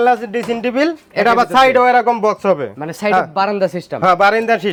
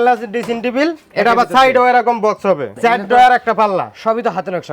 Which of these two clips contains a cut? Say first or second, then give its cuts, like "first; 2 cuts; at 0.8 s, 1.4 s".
second; 1 cut; at 2.7 s